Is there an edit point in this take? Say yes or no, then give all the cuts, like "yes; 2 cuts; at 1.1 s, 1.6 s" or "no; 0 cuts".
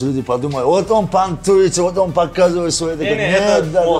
no; 0 cuts